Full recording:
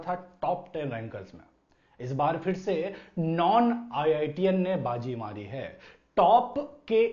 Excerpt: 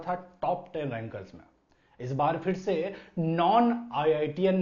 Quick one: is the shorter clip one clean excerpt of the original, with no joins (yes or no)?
yes